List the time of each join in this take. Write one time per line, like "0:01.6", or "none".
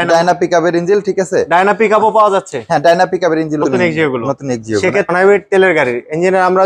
0:03.6